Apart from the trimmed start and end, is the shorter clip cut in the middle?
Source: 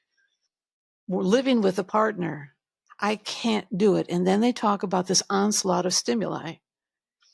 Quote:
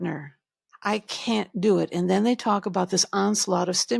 no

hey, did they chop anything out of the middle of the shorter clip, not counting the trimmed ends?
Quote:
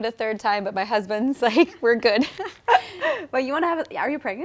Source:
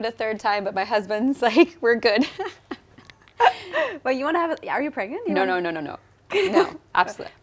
yes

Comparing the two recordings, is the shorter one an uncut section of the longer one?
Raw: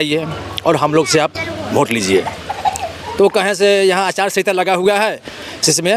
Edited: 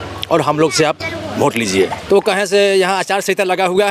no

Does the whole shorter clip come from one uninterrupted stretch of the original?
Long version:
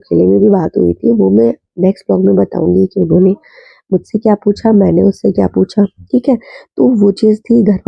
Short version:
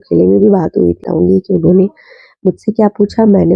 no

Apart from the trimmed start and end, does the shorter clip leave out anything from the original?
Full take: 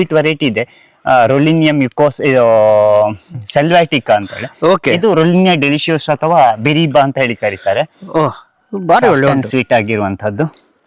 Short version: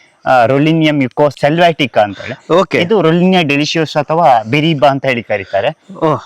yes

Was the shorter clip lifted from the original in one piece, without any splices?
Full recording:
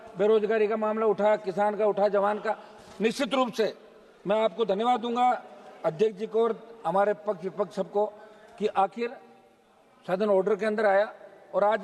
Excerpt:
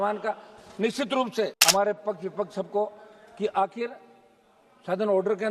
no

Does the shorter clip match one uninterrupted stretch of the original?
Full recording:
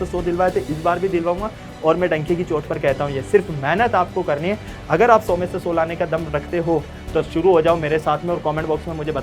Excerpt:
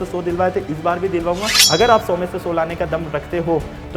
no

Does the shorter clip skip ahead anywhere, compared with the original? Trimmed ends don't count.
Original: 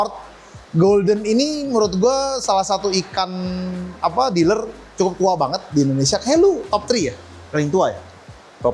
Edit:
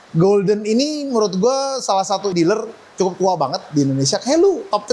yes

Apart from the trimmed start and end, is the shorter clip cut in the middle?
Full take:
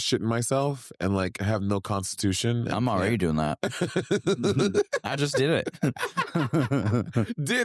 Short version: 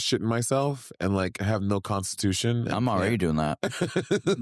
no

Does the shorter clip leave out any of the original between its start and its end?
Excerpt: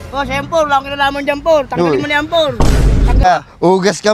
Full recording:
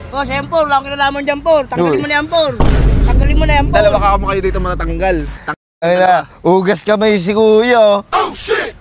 yes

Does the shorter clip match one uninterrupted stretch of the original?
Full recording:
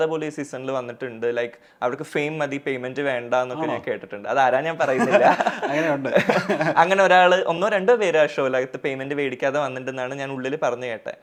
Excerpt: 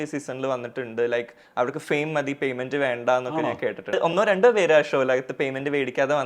no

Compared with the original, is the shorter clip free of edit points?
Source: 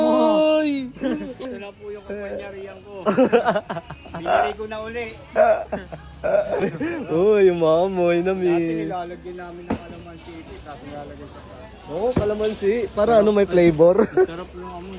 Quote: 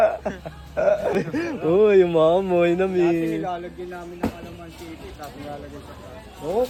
yes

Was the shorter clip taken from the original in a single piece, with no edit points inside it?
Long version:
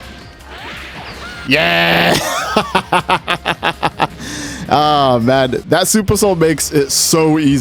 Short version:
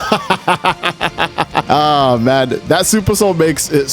no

